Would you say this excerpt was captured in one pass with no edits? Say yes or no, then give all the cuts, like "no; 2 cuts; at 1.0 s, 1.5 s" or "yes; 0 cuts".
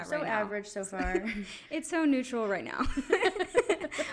yes; 0 cuts